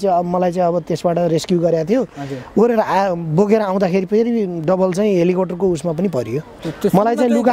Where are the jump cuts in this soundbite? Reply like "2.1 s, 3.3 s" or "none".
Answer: 6.5 s